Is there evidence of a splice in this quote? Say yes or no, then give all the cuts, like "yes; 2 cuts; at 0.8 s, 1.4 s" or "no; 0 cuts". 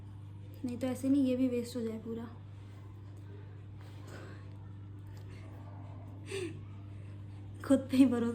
no; 0 cuts